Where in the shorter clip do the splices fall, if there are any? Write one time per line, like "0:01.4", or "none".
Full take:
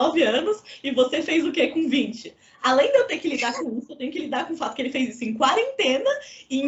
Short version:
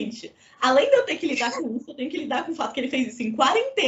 none